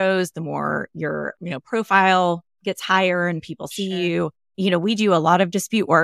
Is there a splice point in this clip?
yes; 1 cut; at 4.5 s

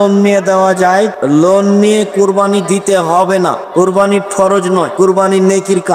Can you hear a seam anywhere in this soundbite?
yes; 3 cuts; at 1.1 s, 3.6 s, 4.9 s

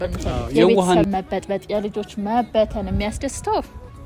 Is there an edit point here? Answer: yes; 1 cut; at 1.0 s

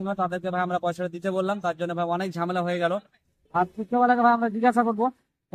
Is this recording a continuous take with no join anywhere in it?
yes; 0 cuts

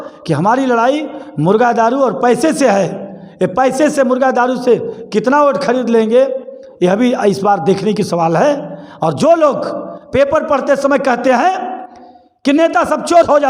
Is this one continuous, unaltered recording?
yes; 0 cuts

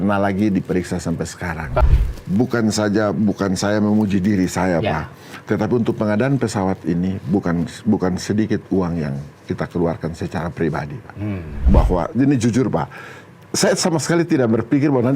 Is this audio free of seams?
no; 2 cuts; at 1.8 s, 11.7 s

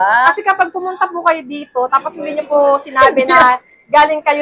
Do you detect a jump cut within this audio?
no; 0 cuts

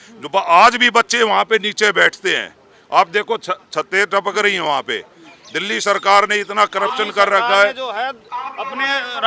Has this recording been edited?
no; 0 cuts

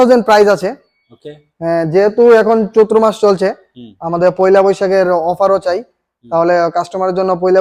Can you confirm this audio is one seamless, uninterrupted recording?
yes; 0 cuts

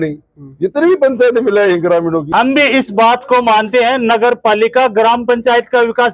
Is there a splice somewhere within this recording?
yes; 1 cut; at 2.3 s

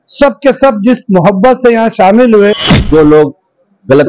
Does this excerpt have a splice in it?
yes; 1 cut; at 2.7 s

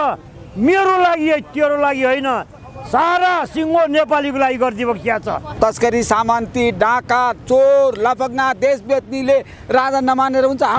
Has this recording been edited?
yes; 1 cut; at 5.5 s

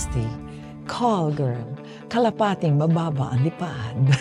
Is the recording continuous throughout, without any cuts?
yes; 0 cuts

